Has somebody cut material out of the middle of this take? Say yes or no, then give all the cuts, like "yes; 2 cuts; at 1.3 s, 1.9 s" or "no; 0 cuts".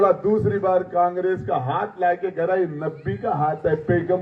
no; 0 cuts